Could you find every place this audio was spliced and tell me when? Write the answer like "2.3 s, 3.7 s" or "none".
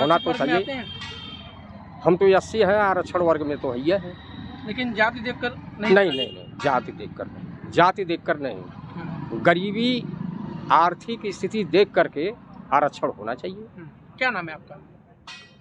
none